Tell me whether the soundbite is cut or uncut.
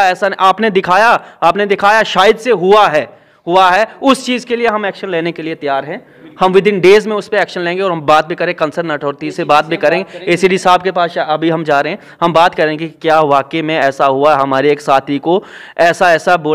uncut